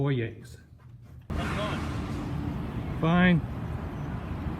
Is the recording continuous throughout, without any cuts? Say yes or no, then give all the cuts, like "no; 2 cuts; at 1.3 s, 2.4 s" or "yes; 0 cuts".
no; 1 cut; at 1.3 s